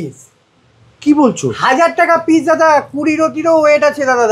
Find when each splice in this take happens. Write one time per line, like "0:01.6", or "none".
none